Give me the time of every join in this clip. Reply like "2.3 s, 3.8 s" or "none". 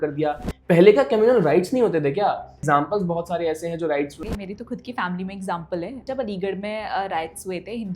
2.6 s, 4.2 s, 6.0 s